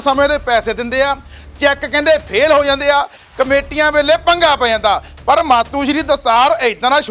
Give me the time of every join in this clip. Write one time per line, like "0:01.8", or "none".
none